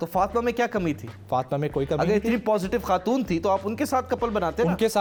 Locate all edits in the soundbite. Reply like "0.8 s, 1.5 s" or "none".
none